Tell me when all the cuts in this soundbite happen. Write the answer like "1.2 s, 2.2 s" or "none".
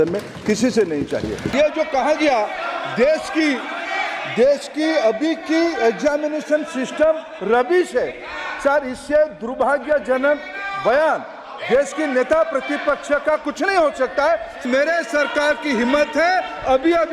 1.5 s, 14.6 s